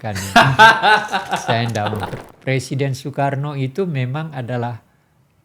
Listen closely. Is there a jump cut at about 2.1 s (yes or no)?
yes